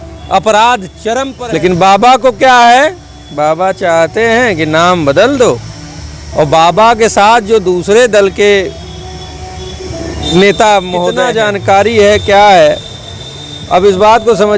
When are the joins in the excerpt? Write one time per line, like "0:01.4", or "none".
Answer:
0:01.3
0:11.2